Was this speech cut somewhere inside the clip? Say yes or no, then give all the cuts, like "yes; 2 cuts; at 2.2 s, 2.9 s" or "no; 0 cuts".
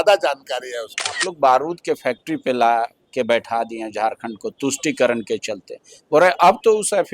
yes; 1 cut; at 1.3 s